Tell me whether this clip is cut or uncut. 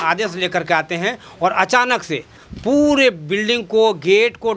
cut